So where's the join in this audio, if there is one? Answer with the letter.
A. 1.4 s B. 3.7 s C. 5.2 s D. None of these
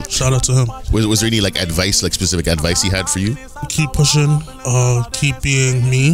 B